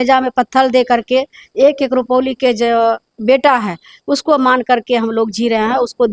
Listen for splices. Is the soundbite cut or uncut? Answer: uncut